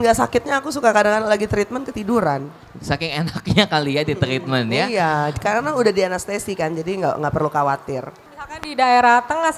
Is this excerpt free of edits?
no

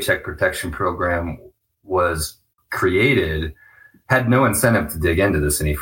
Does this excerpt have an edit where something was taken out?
yes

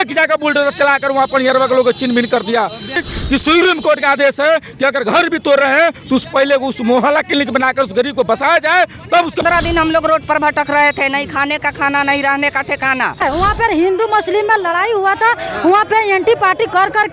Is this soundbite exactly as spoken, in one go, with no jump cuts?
no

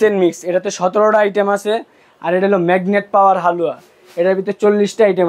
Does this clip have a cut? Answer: no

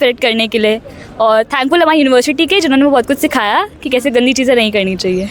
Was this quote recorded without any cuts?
yes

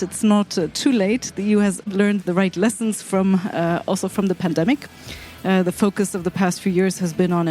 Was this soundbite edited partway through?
yes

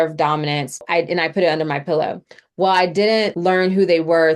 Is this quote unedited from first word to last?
no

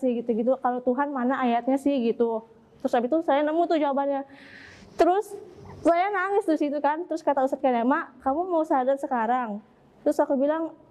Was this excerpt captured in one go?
yes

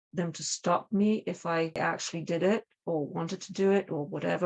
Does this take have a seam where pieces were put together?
yes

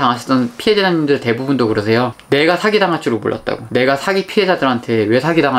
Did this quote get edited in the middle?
no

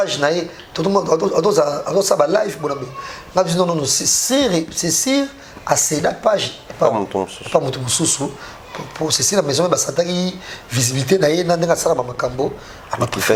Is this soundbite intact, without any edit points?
yes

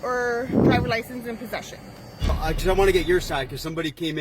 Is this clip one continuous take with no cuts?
no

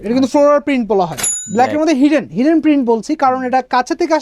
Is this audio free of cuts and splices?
no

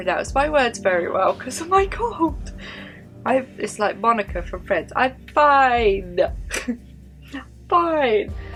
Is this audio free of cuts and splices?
yes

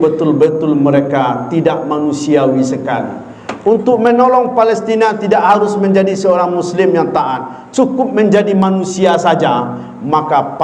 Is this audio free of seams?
yes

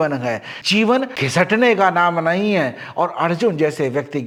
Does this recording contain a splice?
no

